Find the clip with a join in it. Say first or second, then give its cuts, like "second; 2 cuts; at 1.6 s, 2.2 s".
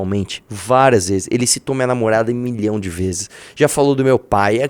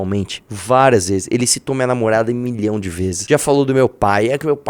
second; 1 cut; at 3.2 s